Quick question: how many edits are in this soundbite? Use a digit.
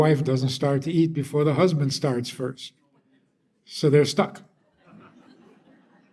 0